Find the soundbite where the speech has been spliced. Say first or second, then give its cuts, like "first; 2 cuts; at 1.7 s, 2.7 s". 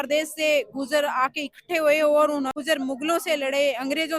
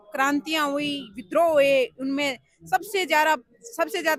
first; 1 cut; at 2.5 s